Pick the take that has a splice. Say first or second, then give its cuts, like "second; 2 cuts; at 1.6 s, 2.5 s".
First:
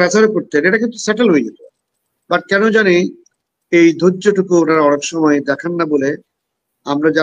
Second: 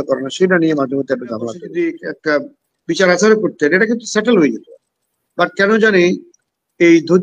second; 1 cut; at 1.6 s